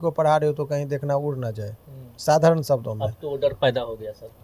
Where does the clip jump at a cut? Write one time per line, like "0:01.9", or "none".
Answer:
none